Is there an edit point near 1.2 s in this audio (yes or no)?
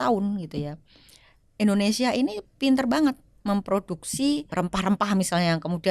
no